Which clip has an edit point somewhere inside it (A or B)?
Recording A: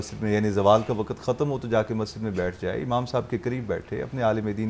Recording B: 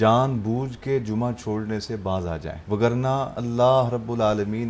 B